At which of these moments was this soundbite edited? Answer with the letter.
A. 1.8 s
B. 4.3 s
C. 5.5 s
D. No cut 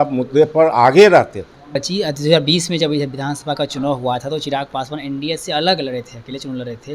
A